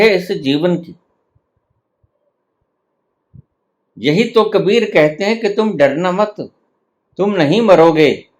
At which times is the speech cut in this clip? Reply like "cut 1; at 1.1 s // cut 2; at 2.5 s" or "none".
cut 1; at 2.3 s